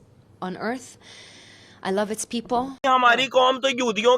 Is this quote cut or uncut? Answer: cut